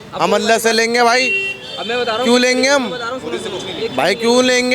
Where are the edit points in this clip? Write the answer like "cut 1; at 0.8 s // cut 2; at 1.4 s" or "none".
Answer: none